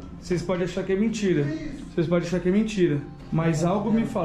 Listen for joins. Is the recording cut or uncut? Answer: cut